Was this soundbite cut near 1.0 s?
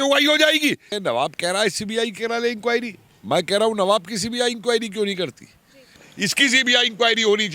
yes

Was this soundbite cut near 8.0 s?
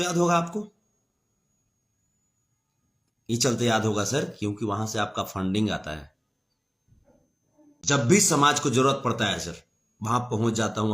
yes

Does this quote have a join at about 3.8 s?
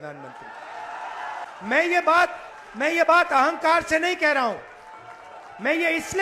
no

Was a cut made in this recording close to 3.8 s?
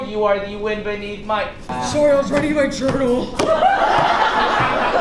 no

